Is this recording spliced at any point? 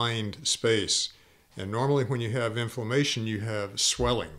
no; 0 cuts

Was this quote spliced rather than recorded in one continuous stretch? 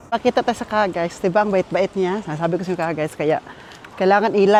no; 0 cuts

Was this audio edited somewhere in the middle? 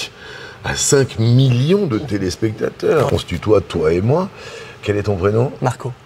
yes; 1 cut; at 3.1 s

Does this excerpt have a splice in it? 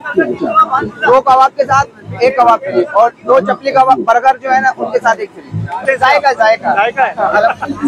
yes; 1 cut; at 5.8 s

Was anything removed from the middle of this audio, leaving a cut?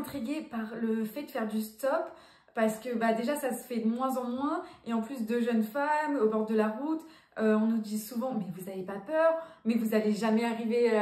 no; 0 cuts

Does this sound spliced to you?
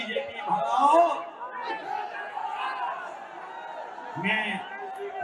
no; 0 cuts

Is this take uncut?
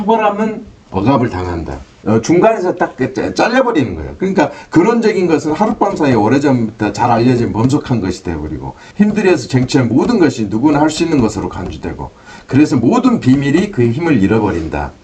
yes; 0 cuts

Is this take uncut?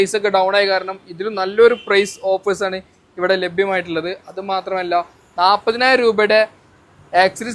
yes; 0 cuts

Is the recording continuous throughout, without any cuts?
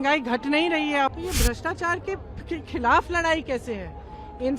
no; 1 cut; at 1.1 s

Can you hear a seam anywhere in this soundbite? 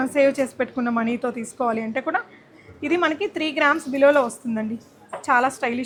no; 0 cuts

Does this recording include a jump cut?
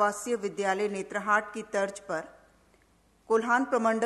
no; 0 cuts

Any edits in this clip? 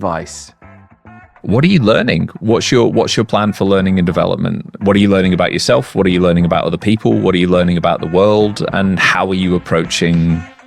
yes; 1 cut; at 0.9 s

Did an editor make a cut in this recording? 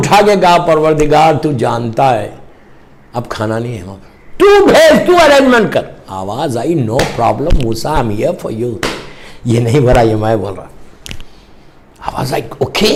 no; 0 cuts

